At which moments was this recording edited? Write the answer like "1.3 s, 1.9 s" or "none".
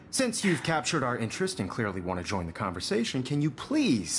3.0 s